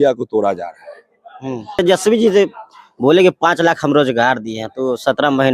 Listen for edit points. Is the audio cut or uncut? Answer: cut